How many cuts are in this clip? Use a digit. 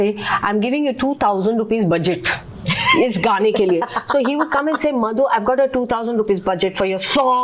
0